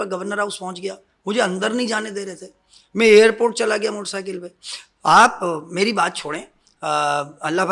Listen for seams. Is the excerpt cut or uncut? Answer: uncut